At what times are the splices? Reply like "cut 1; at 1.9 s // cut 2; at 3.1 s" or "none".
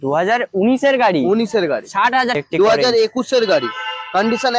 cut 1; at 2.4 s